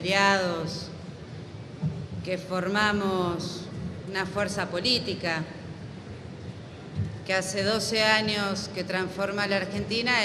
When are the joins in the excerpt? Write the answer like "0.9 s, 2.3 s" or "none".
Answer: 7.6 s